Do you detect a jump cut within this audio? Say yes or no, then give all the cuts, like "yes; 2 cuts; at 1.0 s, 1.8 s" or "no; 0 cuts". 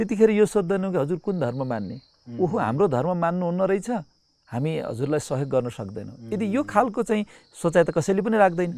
no; 0 cuts